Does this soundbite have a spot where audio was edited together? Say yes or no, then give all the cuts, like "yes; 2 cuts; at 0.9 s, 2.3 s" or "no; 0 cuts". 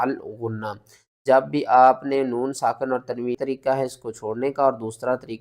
yes; 1 cut; at 3.4 s